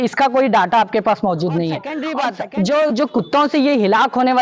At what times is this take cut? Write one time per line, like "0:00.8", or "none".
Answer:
0:02.0

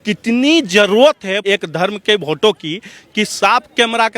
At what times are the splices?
0:01.4

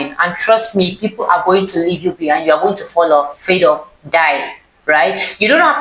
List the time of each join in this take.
none

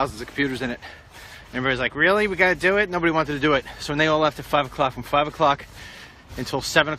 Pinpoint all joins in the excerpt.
0:02.8

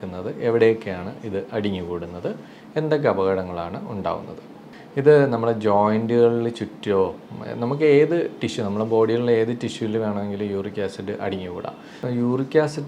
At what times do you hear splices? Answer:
0:04.6
0:12.0

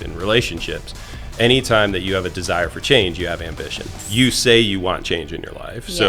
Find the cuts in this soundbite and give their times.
0:04.0

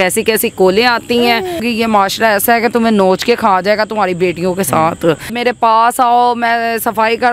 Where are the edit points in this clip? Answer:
0:01.6
0:05.3

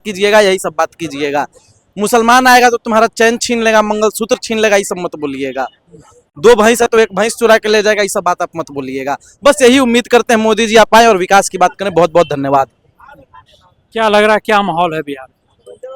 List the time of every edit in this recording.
none

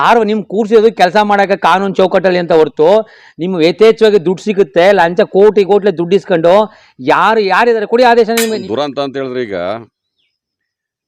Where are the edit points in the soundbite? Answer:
0:08.6

